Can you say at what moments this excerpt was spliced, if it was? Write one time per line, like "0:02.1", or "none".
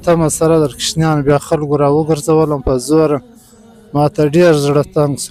none